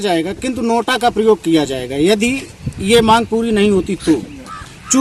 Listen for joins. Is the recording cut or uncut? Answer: uncut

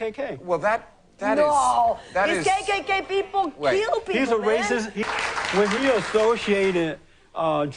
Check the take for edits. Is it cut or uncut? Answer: cut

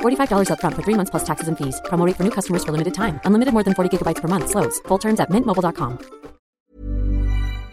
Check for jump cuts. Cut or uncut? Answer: cut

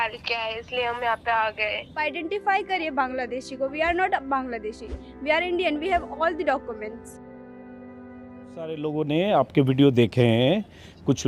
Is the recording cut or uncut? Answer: cut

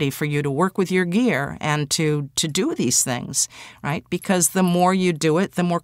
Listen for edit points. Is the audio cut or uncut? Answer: uncut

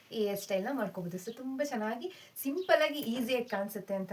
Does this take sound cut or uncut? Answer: uncut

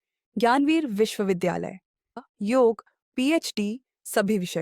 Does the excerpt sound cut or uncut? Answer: cut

